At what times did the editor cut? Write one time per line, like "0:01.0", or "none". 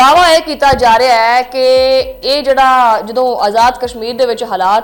none